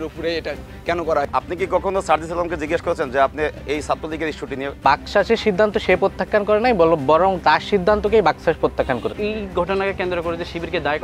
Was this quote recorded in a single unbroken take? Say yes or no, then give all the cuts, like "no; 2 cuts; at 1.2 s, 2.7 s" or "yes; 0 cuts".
no; 3 cuts; at 1.2 s, 4.8 s, 9.1 s